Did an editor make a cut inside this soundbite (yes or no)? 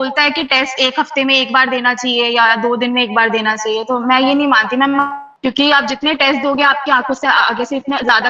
no